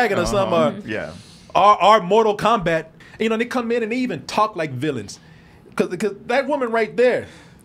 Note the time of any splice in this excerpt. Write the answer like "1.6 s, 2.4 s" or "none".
3.0 s